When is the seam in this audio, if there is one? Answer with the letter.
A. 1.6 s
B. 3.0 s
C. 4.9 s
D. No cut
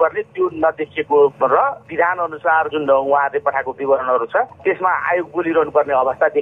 A